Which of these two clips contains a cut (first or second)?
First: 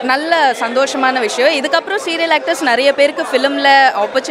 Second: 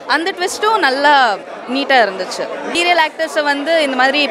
second